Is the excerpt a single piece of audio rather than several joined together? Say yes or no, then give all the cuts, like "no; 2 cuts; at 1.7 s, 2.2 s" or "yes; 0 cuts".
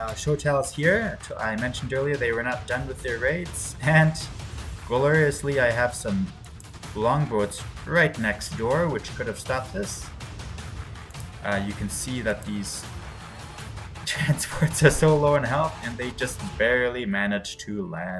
yes; 0 cuts